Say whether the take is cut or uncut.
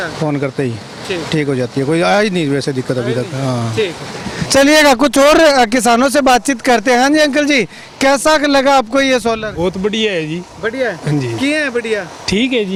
uncut